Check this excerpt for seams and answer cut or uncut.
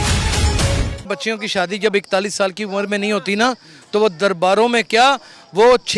cut